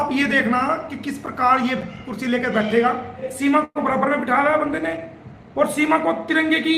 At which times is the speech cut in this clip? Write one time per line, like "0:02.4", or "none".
0:03.3